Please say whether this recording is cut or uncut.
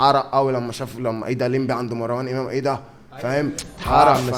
uncut